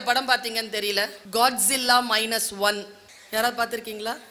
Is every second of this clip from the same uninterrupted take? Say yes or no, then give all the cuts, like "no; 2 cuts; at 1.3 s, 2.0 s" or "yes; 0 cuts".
no; 1 cut; at 1.2 s